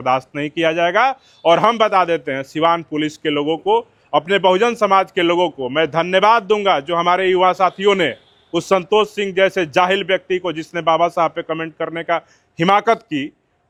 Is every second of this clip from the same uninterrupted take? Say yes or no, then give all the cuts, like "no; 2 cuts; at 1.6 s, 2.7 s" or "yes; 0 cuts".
yes; 0 cuts